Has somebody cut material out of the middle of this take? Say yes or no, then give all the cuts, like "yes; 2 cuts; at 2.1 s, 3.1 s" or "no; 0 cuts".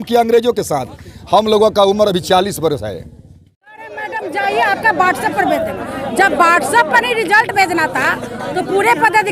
yes; 1 cut; at 3.7 s